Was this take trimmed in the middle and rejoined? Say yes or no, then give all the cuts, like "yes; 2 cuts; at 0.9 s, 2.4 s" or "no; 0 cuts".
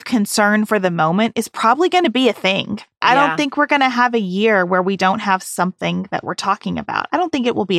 yes; 1 cut; at 3.0 s